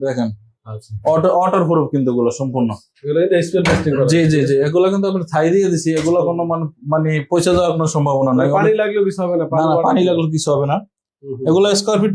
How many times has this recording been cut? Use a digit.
0